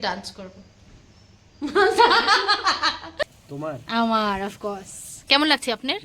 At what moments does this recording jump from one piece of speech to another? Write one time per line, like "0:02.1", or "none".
0:03.2